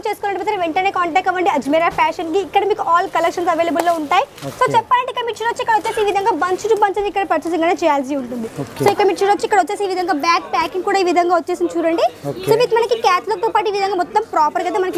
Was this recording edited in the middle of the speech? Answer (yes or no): no